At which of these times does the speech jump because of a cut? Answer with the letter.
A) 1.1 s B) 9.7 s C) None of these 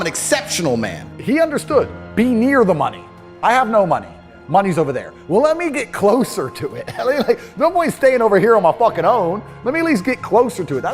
A